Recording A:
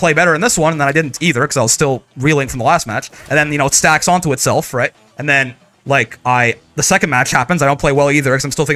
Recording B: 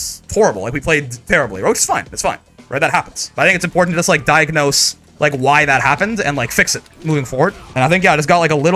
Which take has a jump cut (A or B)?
B